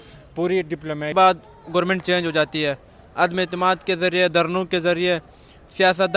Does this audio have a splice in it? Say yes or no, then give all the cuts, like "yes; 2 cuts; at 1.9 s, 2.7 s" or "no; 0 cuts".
yes; 1 cut; at 1.1 s